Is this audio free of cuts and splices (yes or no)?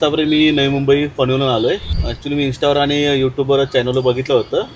no